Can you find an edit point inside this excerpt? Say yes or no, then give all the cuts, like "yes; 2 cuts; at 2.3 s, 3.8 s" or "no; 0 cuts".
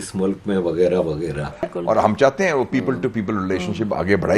yes; 1 cut; at 1.7 s